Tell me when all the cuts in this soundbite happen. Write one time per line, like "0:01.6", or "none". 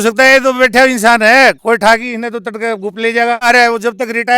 0:03.5